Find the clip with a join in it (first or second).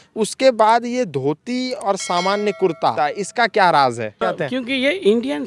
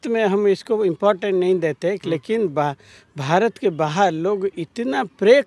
first